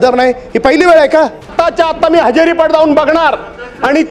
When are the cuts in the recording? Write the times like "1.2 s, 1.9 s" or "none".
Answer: 1.4 s